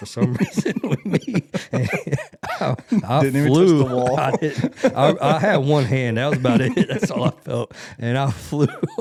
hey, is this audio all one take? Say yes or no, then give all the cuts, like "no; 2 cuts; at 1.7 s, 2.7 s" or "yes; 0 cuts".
yes; 0 cuts